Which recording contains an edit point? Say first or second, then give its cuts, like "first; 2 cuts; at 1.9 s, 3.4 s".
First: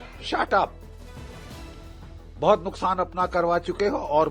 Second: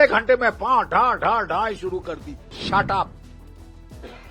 second; 1 cut; at 2.6 s